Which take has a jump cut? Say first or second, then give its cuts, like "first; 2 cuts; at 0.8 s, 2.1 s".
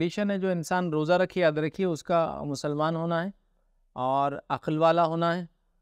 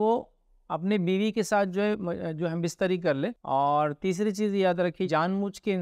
second; 2 cuts; at 3.4 s, 5.1 s